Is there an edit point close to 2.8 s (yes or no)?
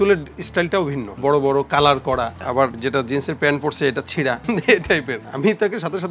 yes